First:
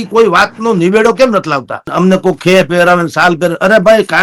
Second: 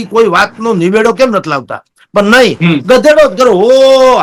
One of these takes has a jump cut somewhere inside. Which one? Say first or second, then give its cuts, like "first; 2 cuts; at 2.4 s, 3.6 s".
first; 1 cut; at 1.9 s